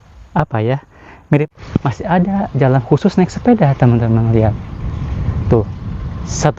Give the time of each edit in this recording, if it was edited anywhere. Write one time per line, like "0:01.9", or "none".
0:01.5